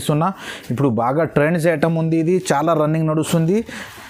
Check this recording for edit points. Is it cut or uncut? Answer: uncut